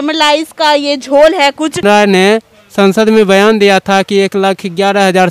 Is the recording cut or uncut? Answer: cut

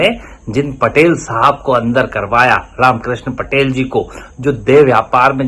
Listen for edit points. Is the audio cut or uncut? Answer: uncut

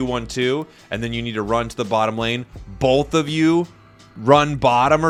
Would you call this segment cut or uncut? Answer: uncut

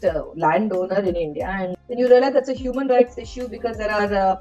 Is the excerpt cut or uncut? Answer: cut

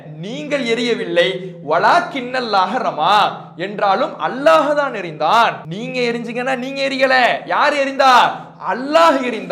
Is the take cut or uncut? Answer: cut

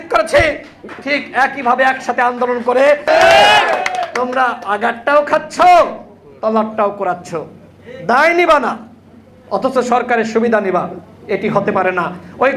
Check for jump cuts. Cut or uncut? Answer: cut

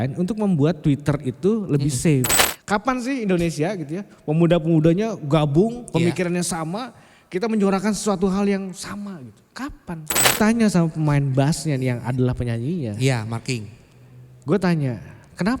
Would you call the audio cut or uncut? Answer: cut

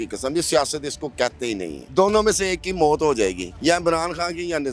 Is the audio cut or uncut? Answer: cut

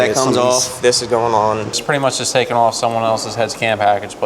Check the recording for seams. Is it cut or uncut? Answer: cut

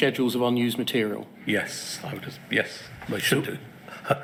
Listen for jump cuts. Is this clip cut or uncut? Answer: uncut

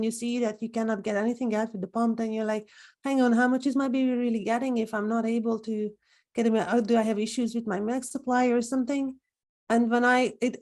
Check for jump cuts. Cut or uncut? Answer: uncut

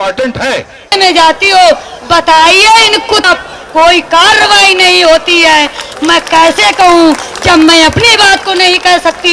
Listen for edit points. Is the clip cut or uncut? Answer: cut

